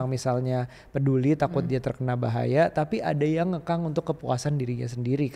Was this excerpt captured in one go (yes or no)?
yes